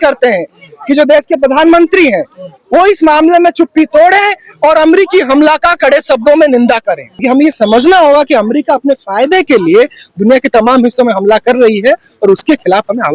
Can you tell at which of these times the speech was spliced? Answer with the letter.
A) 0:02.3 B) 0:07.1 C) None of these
B